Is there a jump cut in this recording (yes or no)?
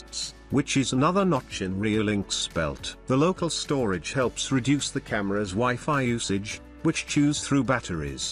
no